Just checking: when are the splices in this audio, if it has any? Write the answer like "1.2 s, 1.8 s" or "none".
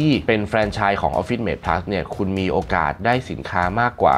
none

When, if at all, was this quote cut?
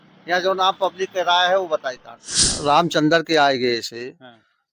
2.5 s

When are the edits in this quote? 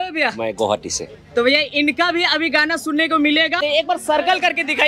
3.6 s

